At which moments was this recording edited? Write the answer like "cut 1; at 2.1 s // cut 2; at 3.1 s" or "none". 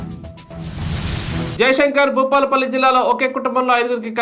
cut 1; at 1.5 s